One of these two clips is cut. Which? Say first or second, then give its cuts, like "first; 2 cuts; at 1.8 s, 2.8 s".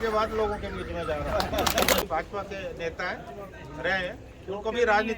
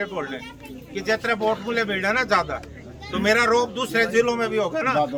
first; 1 cut; at 2.0 s